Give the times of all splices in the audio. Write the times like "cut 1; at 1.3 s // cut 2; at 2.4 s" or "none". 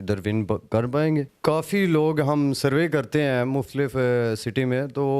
cut 1; at 1.3 s